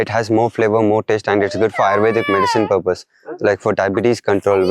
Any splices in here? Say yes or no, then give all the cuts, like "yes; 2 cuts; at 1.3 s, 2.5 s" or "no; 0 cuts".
no; 0 cuts